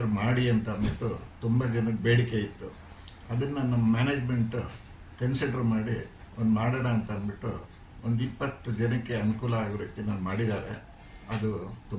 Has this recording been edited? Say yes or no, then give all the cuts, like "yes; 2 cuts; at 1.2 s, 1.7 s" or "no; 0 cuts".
no; 0 cuts